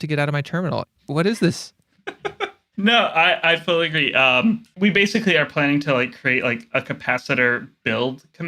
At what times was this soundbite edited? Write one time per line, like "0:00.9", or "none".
0:01.0
0:02.6
0:04.7